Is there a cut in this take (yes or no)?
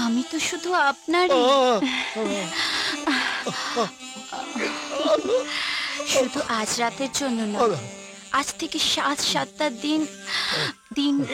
no